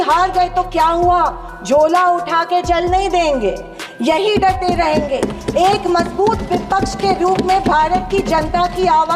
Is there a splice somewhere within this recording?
yes; 1 cut; at 3.8 s

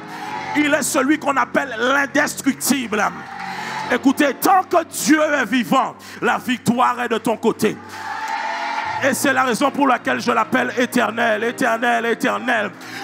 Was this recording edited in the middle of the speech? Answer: yes; 1 cut; at 8.9 s

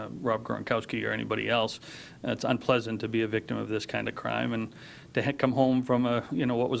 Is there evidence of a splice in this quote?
no; 0 cuts

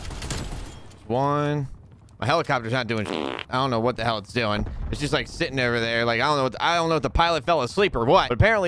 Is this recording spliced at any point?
no; 0 cuts

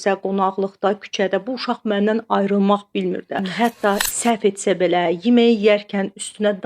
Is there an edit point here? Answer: yes; 1 cut; at 3.4 s

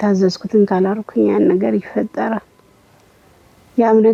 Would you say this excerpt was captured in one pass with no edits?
yes; 0 cuts

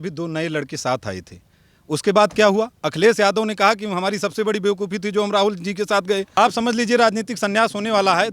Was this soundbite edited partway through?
yes; 1 cut; at 6.3 s

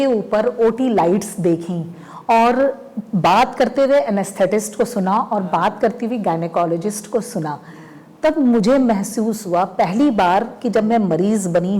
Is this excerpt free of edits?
yes; 0 cuts

